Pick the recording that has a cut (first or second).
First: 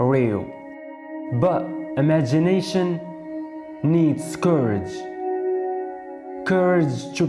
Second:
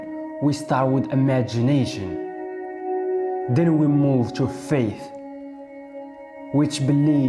second